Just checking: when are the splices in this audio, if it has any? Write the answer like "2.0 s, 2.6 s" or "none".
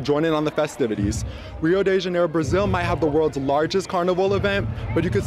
none